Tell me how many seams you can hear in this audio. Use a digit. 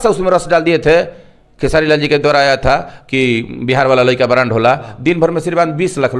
0